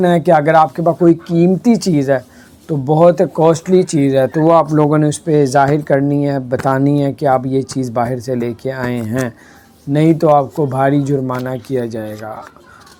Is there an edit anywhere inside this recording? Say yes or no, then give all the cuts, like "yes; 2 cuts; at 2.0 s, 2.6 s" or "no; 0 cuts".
no; 0 cuts